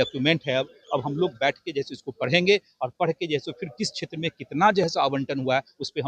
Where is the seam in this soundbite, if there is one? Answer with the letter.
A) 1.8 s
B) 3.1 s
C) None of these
C